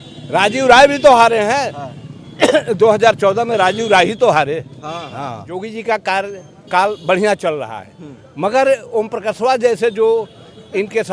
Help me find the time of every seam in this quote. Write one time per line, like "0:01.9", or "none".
0:05.7